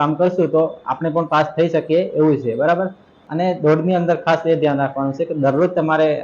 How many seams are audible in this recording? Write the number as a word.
one